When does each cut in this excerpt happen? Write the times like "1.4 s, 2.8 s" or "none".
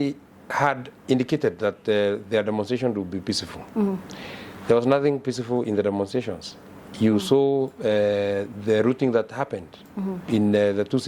none